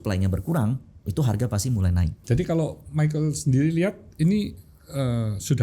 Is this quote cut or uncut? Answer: cut